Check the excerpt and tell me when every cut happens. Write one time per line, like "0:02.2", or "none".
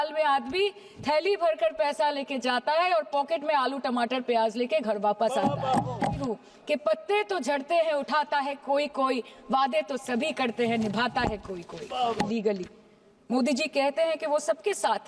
0:06.2
0:12.3